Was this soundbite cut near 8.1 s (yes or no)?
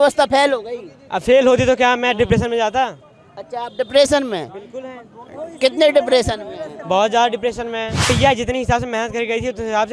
yes